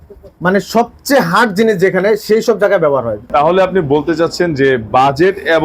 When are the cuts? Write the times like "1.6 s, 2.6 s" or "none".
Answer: 3.2 s